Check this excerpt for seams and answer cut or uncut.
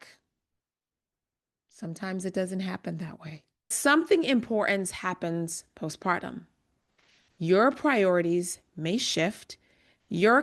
cut